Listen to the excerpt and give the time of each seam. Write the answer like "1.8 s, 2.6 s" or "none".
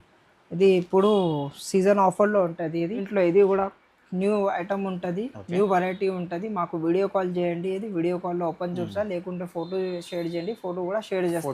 3.1 s